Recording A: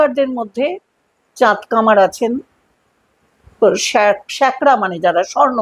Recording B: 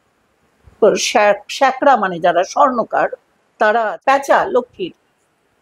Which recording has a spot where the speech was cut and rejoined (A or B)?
B